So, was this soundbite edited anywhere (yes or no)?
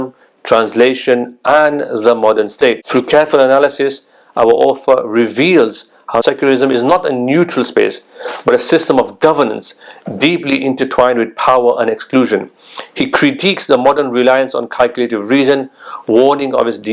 yes